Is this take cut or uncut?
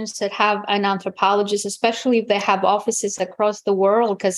uncut